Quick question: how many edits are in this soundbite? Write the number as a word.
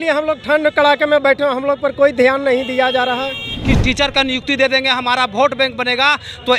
one